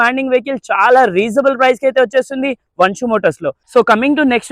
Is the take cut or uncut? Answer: uncut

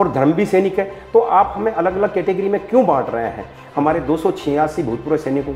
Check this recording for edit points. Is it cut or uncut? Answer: cut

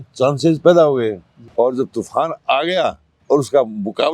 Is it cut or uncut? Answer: cut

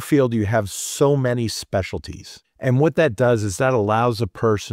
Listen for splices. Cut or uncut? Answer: uncut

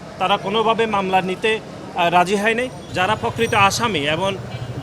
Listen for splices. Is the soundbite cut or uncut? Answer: cut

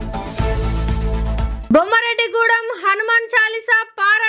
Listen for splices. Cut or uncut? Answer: cut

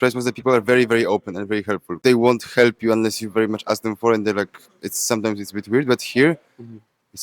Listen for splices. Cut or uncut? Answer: cut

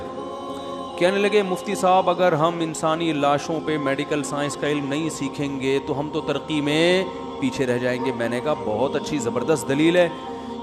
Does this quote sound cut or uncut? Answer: uncut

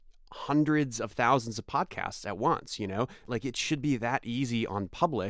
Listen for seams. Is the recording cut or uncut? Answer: cut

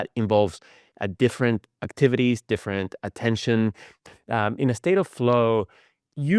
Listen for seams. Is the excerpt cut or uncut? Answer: cut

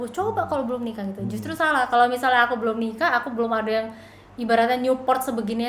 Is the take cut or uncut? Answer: uncut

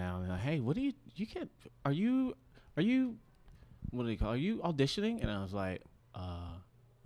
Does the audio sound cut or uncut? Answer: uncut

